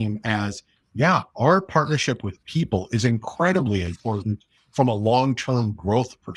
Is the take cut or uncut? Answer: uncut